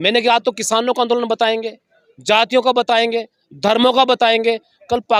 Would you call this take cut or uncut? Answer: uncut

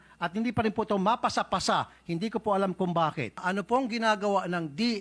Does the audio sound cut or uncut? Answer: cut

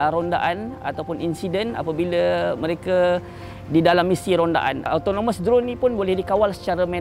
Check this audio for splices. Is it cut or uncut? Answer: cut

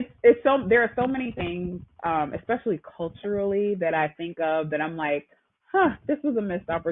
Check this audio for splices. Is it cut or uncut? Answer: uncut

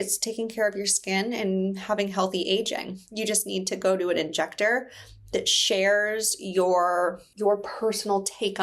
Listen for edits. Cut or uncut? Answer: cut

